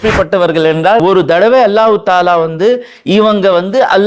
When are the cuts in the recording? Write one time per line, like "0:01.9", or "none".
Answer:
0:01.0